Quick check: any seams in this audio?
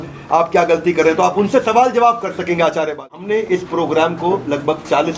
yes; 1 cut; at 3.3 s

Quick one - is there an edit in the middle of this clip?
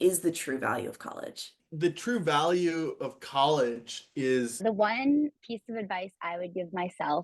yes; 2 cuts; at 1.6 s, 4.6 s

